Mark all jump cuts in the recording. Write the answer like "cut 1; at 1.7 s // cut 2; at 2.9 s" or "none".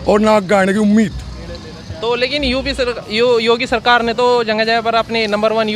none